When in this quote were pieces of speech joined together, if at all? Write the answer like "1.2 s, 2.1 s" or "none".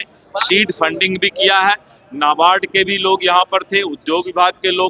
none